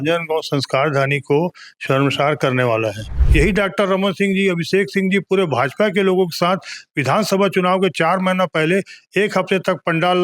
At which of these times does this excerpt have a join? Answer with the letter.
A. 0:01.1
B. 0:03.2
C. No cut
B